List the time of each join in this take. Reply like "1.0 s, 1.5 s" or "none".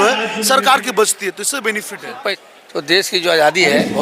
2.4 s